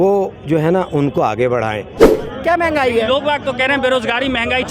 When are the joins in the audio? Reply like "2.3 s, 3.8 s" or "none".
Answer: 2.2 s